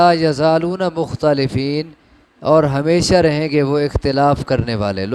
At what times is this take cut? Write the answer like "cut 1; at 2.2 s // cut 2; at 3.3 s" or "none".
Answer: none